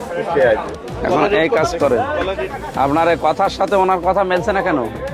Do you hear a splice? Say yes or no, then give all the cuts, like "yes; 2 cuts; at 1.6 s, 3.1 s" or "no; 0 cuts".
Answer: yes; 1 cut; at 2.6 s